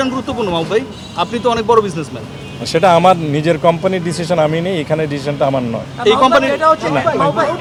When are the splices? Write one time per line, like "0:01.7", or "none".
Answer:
none